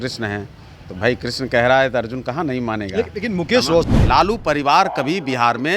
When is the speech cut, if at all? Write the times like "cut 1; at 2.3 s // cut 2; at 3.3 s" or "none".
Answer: cut 1; at 3.8 s